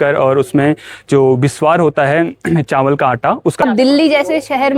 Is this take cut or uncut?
cut